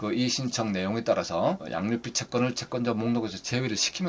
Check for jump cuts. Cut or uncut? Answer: uncut